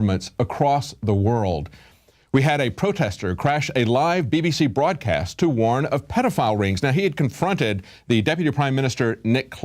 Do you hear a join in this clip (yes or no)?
no